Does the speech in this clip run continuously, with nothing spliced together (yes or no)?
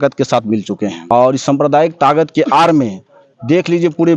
no